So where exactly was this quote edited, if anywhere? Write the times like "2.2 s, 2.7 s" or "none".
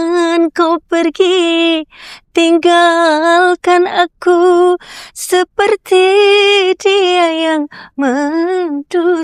none